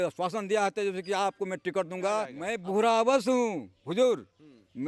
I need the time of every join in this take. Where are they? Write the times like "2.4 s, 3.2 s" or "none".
2.4 s